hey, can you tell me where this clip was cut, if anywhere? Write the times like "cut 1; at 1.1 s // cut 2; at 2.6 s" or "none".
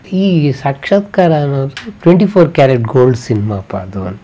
none

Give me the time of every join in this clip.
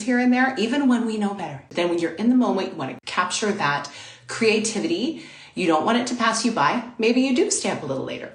cut 1; at 1.6 s // cut 2; at 3.0 s

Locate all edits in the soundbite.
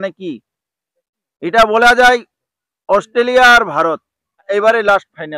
cut 1; at 4.4 s

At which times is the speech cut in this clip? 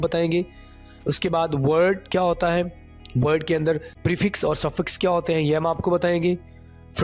cut 1; at 3.9 s

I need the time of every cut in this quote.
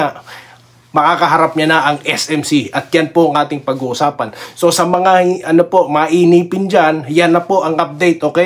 none

